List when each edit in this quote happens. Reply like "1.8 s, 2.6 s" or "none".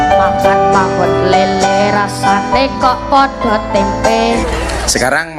4.4 s